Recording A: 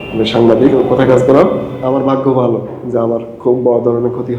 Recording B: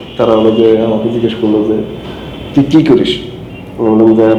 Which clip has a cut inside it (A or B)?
A